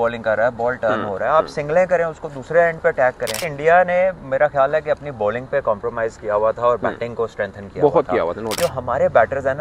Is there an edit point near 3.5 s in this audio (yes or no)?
yes